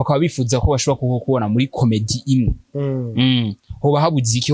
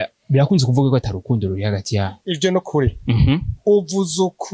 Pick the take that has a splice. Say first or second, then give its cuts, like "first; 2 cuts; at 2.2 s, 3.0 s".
second; 1 cut; at 2.2 s